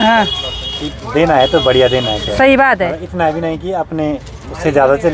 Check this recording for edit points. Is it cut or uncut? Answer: uncut